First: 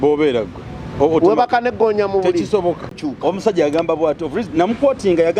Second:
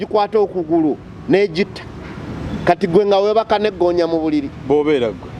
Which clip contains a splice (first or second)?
first